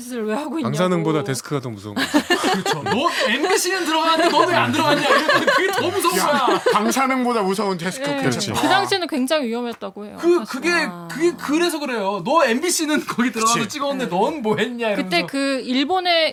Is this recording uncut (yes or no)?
yes